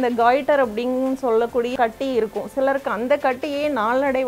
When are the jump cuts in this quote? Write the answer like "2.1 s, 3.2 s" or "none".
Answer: 1.7 s